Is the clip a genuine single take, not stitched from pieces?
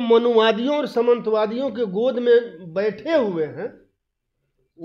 yes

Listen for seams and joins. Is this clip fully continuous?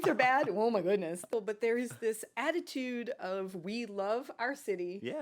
no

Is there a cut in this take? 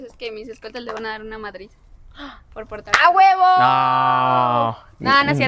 no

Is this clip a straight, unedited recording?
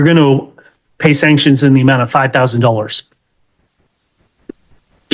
yes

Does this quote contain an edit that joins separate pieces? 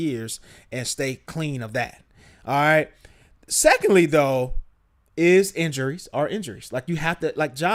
no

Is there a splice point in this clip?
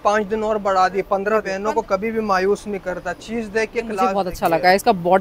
yes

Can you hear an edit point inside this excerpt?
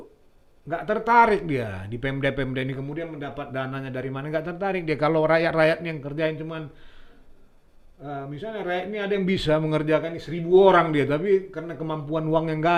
no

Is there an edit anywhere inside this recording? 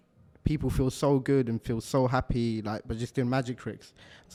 no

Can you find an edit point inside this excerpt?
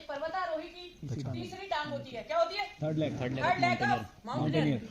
no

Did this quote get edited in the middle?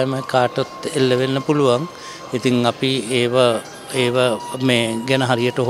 no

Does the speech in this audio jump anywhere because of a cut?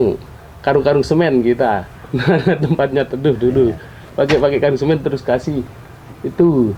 no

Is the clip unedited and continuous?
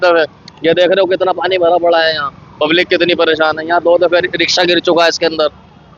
yes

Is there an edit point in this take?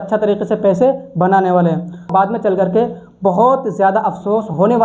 yes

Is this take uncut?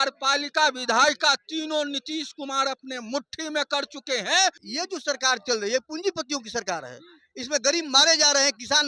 no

